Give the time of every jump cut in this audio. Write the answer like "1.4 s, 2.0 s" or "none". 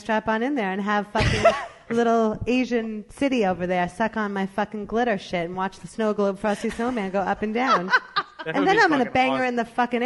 none